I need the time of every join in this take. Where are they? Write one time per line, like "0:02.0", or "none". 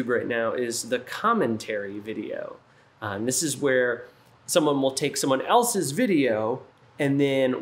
none